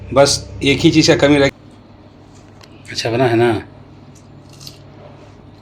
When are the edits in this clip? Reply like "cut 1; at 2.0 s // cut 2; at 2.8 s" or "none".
cut 1; at 1.5 s